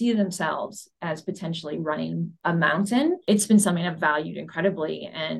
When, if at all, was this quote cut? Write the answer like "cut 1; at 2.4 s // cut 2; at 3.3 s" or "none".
cut 1; at 2.3 s // cut 2; at 3.2 s